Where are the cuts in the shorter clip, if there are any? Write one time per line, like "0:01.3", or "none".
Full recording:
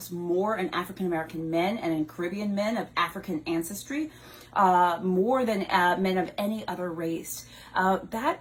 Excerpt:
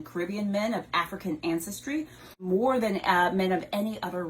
0:02.4